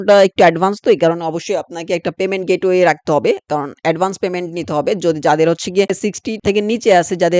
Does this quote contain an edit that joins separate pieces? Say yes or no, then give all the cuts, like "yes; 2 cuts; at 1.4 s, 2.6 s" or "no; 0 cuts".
no; 0 cuts